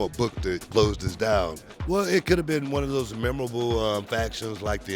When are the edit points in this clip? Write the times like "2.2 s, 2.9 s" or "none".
1.6 s